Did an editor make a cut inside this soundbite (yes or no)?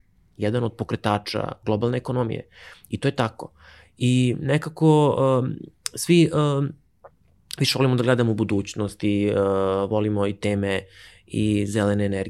no